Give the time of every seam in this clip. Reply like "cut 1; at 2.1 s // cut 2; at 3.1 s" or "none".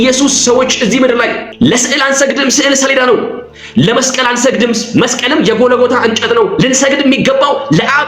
cut 1; at 1.4 s